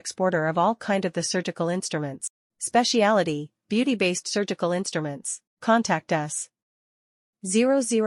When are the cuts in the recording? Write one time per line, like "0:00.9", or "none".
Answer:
none